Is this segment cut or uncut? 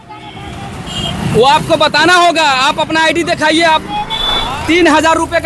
cut